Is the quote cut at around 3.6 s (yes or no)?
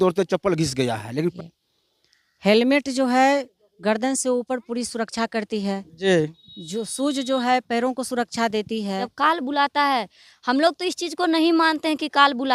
no